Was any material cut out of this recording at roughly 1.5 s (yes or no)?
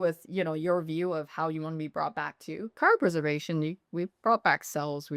no